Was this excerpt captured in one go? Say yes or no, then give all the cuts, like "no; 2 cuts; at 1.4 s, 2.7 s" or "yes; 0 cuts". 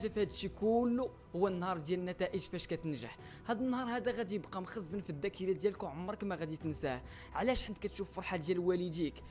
yes; 0 cuts